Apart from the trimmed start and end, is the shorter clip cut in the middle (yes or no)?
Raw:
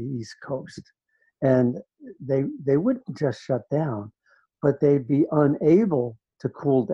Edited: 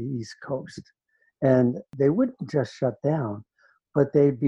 yes